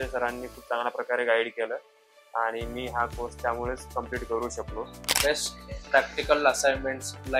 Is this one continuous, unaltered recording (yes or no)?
no